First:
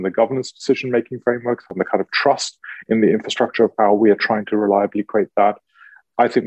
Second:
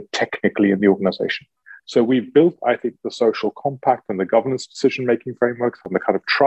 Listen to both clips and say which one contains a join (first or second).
second